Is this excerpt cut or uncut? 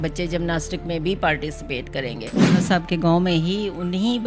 cut